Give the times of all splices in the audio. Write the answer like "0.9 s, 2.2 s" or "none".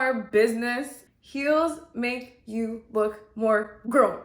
0.9 s